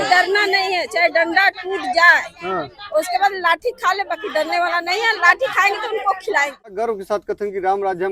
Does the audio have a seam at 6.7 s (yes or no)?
yes